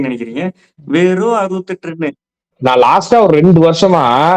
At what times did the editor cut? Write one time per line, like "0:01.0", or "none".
0:02.5